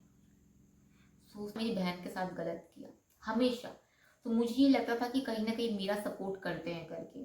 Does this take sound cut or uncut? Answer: cut